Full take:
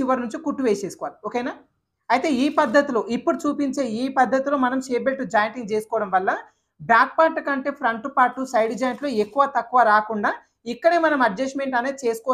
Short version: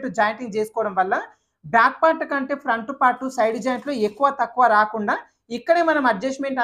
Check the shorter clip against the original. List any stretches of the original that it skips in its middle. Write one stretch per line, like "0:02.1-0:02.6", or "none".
none

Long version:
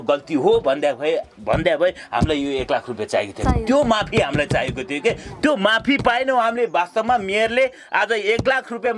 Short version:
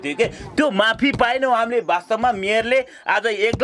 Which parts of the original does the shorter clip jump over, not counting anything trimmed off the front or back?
none

